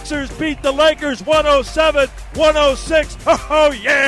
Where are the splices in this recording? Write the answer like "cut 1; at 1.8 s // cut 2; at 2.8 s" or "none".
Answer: cut 1; at 3.1 s